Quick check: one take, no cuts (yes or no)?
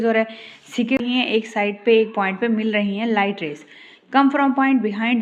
no